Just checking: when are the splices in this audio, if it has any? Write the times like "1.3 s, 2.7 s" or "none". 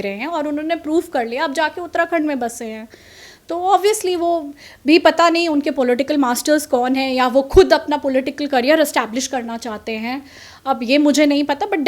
none